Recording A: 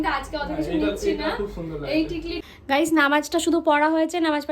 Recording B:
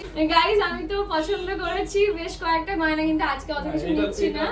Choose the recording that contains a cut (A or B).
A